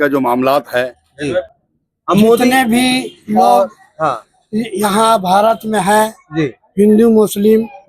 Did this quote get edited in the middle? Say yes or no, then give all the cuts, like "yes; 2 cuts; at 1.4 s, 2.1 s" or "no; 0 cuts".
yes; 1 cut; at 1.5 s